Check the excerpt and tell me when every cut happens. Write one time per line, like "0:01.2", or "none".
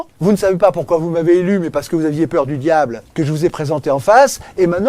0:03.0